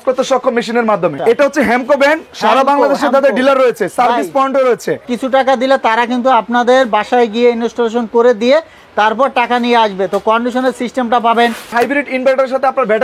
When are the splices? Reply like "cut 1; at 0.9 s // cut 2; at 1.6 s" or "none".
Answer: cut 1; at 1.1 s // cut 2; at 5.0 s // cut 3; at 11.7 s